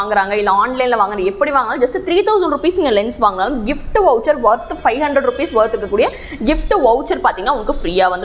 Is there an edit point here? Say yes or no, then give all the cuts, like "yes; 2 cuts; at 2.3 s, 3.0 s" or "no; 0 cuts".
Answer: no; 0 cuts